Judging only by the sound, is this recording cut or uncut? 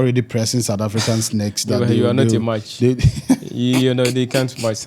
uncut